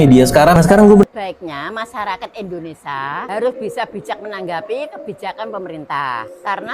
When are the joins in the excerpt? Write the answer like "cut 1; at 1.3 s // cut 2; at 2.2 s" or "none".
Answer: cut 1; at 1.0 s